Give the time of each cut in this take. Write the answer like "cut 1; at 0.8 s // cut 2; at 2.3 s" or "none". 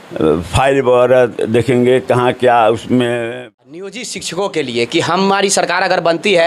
cut 1; at 3.2 s